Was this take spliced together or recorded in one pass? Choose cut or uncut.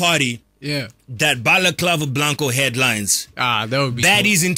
uncut